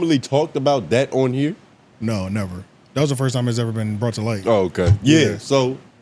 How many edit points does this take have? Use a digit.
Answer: 0